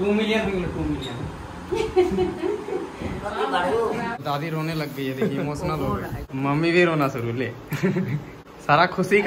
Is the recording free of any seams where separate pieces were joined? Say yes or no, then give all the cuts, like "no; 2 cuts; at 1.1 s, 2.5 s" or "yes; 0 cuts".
no; 3 cuts; at 4.1 s, 6.2 s, 8.3 s